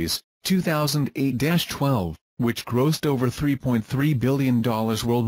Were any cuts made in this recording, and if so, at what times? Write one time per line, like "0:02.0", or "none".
none